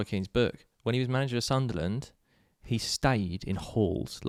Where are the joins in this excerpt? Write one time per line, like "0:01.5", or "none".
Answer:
none